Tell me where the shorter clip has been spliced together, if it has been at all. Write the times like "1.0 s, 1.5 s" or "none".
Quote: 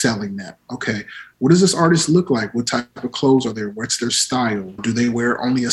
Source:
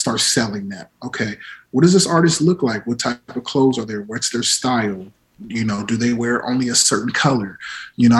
4.8 s